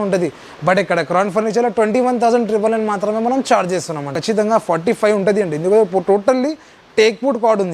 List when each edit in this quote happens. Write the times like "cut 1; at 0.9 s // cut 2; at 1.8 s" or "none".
cut 1; at 4.2 s